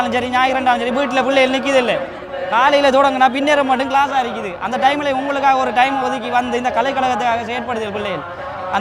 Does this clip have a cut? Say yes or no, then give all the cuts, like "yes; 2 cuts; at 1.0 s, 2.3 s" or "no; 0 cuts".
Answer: no; 0 cuts